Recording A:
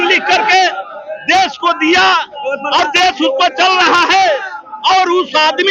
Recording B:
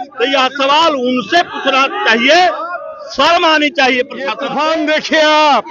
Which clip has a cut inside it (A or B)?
B